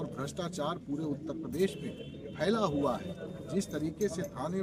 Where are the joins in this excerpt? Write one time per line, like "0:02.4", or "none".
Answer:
none